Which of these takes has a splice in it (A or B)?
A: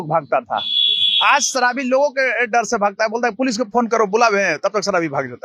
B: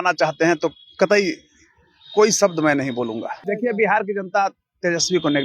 B